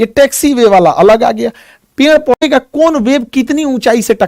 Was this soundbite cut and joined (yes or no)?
yes